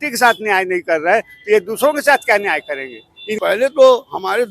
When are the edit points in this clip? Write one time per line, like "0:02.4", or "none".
0:03.4